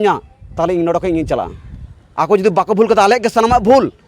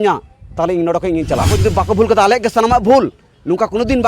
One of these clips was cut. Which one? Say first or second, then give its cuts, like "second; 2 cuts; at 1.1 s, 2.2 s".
second; 1 cut; at 1.5 s